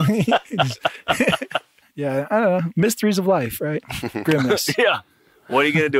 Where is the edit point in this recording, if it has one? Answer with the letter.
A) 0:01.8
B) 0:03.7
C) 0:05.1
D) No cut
A